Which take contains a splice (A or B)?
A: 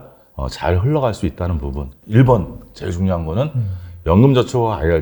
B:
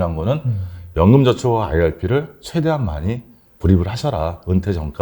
A